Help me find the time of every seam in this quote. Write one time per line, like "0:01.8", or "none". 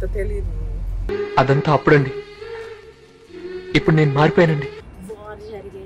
0:04.8